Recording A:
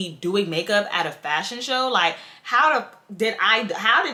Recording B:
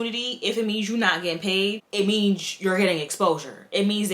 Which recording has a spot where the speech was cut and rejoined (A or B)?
B